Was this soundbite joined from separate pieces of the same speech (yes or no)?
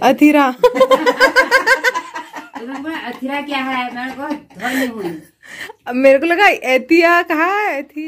no